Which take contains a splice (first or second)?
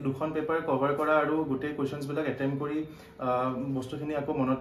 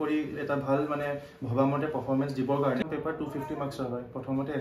second